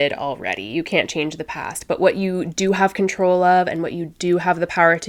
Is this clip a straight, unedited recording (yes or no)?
yes